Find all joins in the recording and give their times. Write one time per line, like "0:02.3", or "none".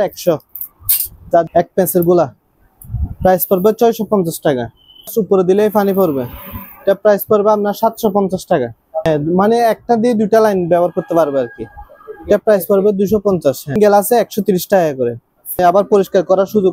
0:01.5
0:05.1
0:09.1
0:13.8
0:15.6